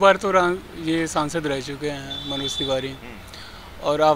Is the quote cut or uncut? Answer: uncut